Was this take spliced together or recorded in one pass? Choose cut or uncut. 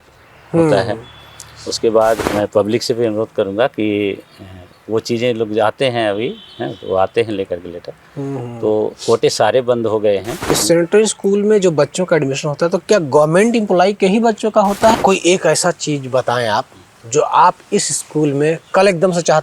cut